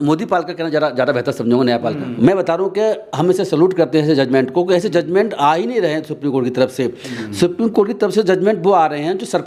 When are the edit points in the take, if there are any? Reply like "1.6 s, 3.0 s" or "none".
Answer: 2.1 s